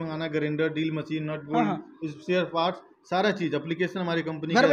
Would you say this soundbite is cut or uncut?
uncut